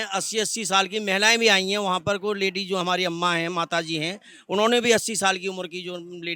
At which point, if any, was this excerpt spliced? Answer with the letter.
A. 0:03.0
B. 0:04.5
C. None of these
C